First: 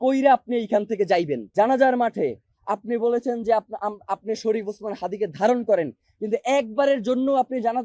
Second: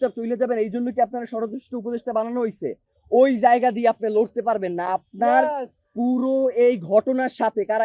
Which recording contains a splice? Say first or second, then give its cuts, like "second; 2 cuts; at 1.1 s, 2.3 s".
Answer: first; 1 cut; at 1.4 s